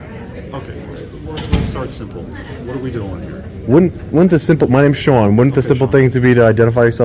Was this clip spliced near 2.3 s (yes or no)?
no